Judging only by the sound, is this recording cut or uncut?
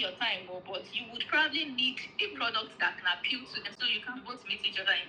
cut